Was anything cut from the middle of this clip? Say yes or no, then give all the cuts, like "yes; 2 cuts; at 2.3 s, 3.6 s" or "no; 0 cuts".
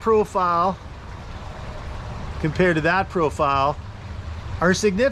no; 0 cuts